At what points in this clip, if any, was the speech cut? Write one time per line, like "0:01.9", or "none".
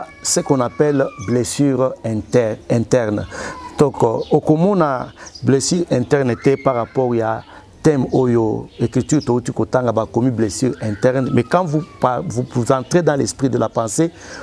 none

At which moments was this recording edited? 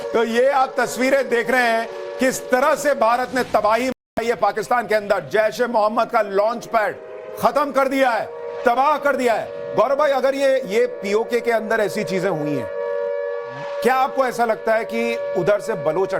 0:13.8

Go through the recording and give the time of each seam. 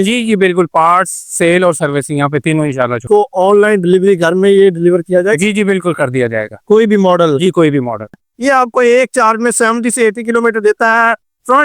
0:03.0
0:08.2

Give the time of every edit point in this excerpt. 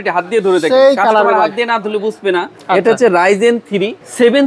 0:02.5

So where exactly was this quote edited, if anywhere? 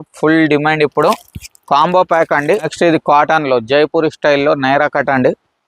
0:02.7

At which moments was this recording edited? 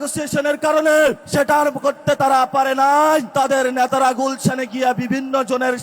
0:01.2
0:03.3

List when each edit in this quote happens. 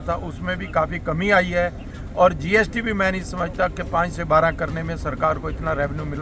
none

